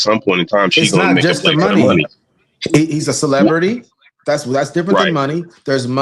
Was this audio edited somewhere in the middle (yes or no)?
no